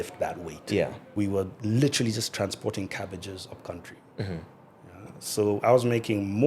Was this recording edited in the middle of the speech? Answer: yes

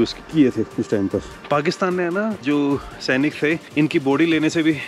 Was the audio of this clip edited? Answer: yes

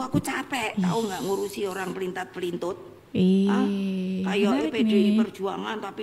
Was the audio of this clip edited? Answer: no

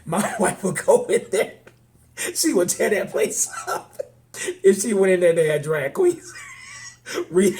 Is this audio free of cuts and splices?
no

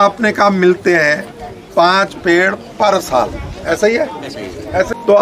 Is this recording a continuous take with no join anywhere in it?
yes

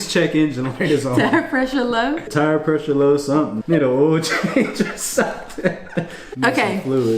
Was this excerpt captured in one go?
no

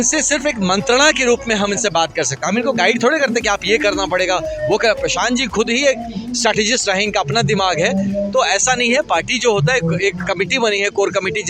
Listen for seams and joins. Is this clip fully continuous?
yes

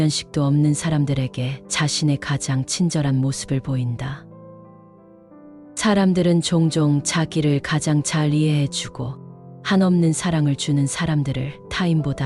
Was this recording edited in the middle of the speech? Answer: no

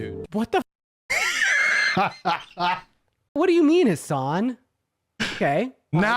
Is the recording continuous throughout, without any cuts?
no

